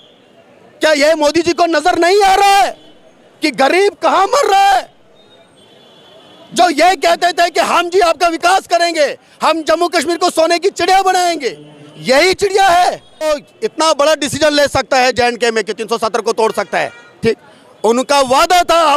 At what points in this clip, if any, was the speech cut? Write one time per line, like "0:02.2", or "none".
0:13.3